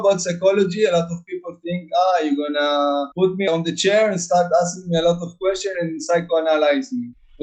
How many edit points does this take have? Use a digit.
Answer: 0